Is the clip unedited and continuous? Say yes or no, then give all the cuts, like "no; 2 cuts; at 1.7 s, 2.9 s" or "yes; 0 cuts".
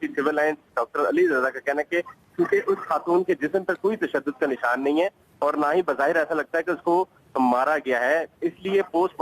yes; 0 cuts